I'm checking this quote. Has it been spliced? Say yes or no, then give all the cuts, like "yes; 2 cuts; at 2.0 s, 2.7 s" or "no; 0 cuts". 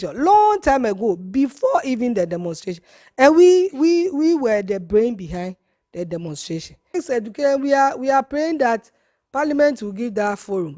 yes; 1 cut; at 6.9 s